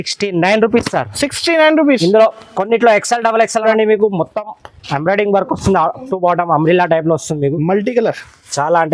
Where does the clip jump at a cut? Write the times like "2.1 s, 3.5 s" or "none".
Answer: 3.6 s